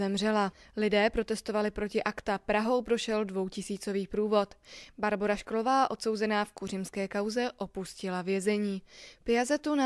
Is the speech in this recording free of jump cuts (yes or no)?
yes